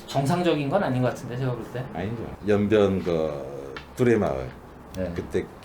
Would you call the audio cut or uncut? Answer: cut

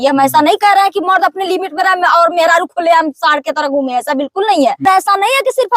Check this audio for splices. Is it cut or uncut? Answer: cut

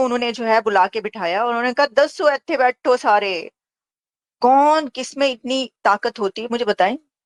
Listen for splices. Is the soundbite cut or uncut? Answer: uncut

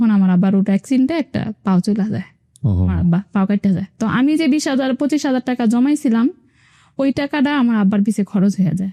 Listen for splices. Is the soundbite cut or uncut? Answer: uncut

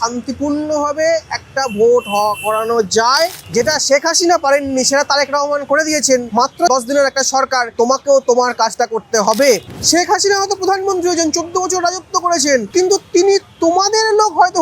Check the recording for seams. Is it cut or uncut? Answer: cut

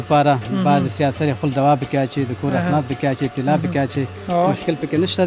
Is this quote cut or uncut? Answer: uncut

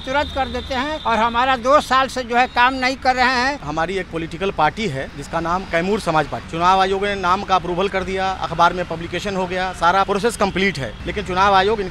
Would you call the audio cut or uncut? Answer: cut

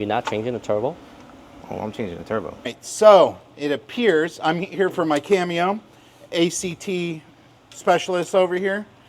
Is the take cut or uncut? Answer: cut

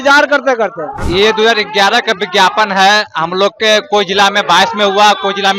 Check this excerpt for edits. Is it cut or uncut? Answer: cut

